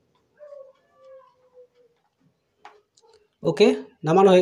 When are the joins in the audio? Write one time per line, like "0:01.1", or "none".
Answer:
none